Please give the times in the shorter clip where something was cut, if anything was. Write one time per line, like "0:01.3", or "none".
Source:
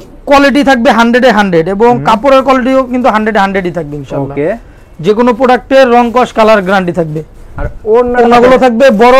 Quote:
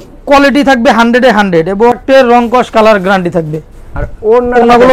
0:02.0